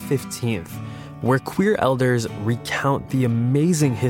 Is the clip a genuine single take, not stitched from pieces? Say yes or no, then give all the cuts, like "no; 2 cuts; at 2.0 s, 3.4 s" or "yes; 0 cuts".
yes; 0 cuts